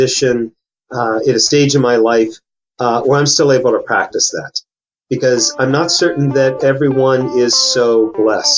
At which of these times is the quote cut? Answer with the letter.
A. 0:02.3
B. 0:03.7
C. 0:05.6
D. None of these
D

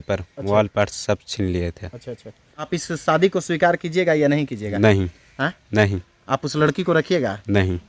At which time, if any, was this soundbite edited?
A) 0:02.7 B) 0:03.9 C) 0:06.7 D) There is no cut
A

